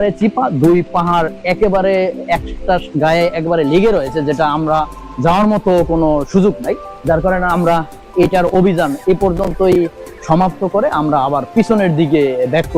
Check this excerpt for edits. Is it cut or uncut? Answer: uncut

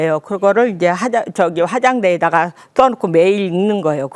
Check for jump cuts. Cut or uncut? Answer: uncut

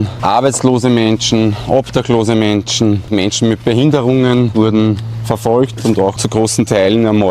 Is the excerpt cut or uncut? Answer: cut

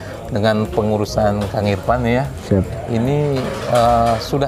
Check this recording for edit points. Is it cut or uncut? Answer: uncut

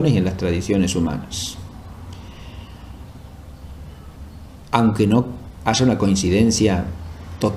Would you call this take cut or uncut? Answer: cut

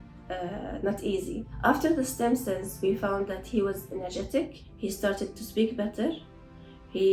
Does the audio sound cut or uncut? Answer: cut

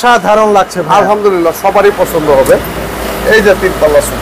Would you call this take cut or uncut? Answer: uncut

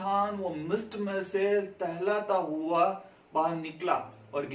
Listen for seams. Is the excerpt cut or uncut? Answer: uncut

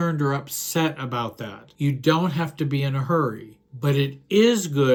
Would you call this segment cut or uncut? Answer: uncut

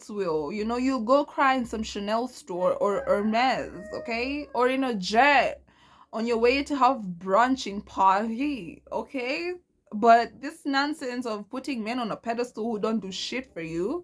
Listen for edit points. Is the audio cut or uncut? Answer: uncut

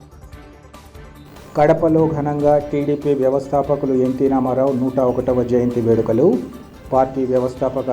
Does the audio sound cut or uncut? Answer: cut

